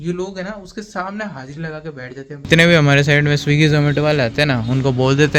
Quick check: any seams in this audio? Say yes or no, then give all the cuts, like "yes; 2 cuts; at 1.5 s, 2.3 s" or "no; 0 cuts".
yes; 1 cut; at 2.5 s